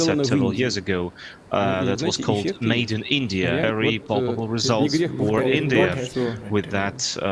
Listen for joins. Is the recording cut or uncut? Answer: cut